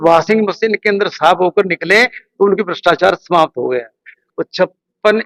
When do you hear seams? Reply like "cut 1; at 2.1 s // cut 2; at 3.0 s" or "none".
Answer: cut 1; at 4.2 s